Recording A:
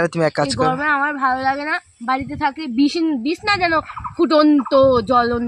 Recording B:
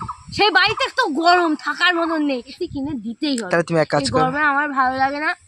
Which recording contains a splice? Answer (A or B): B